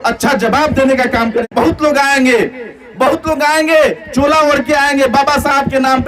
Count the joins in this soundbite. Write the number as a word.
one